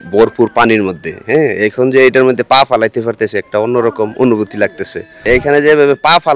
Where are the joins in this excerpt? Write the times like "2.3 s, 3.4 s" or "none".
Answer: 5.3 s